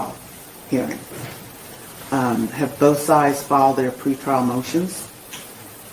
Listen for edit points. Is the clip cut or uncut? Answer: cut